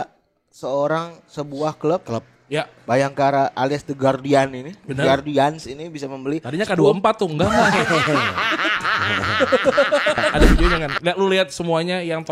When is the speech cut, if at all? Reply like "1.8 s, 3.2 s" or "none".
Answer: 10.3 s

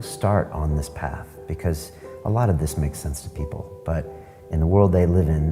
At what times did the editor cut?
none

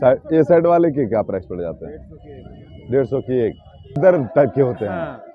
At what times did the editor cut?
4.0 s

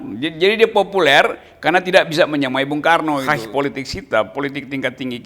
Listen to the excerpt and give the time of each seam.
3.2 s

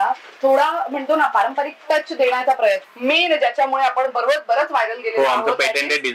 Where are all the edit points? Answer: 2.9 s

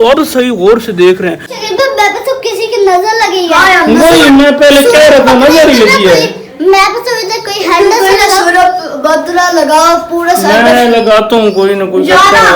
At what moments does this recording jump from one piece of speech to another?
1.6 s

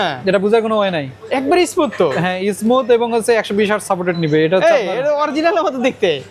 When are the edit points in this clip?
none

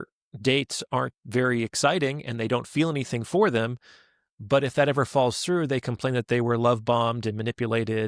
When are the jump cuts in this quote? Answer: none

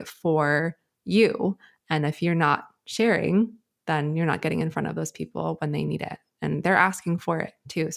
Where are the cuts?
none

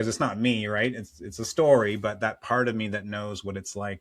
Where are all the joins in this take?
none

